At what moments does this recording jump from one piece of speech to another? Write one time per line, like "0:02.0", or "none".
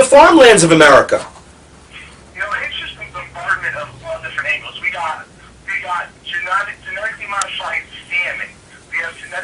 none